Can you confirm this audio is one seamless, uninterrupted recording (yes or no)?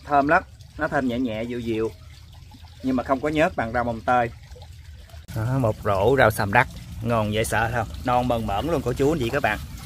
yes